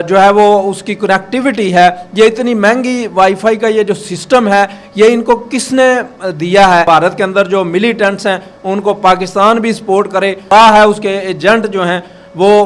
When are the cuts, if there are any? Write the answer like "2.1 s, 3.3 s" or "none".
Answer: 6.8 s, 10.5 s